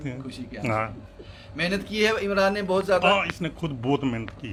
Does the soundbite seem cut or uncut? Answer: uncut